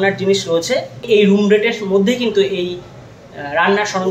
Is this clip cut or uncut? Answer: cut